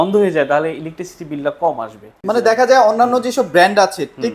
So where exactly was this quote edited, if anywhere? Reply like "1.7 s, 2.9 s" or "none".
2.2 s